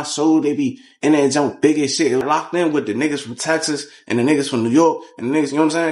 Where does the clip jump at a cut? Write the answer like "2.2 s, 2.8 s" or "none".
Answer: 2.2 s

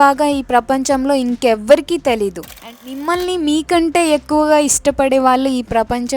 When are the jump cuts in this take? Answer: 2.7 s

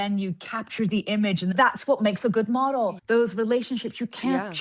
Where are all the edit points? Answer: 1.5 s, 3.0 s

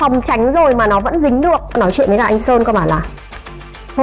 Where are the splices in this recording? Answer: 1.7 s

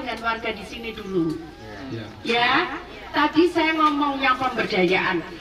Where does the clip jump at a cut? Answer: none

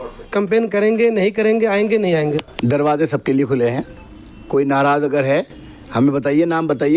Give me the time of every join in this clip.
2.5 s

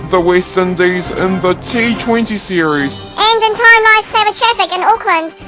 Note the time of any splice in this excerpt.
3.0 s

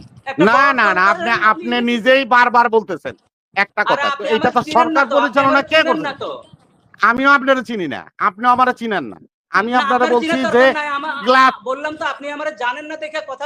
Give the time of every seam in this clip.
none

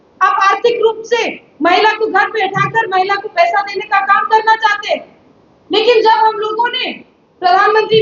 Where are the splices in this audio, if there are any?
none

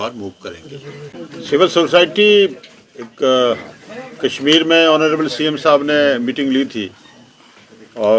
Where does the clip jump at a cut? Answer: none

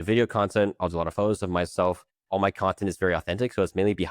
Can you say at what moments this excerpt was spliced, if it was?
2.1 s

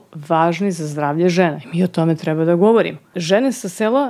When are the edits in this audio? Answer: 3.1 s

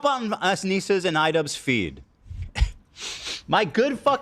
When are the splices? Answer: 1.8 s

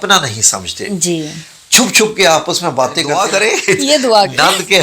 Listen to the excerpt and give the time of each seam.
3.1 s

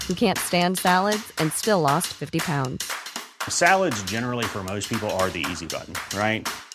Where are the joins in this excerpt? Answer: none

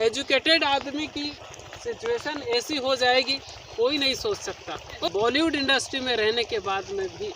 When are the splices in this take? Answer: 4.9 s

